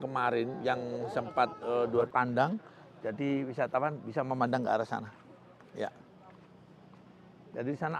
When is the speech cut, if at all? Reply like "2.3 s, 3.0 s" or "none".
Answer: 2.1 s

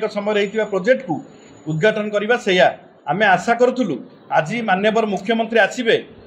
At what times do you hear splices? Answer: none

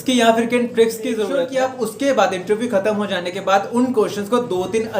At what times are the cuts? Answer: 1.3 s

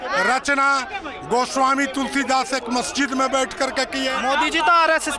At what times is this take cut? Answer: 4.2 s

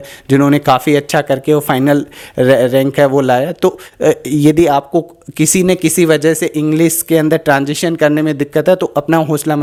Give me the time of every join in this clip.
none

